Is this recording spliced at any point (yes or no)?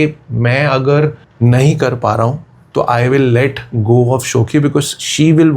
yes